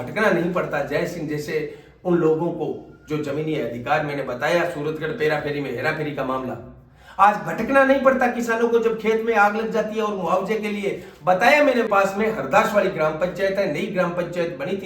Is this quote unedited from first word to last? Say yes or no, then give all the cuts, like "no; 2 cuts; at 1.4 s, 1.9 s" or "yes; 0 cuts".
no; 1 cut; at 11.9 s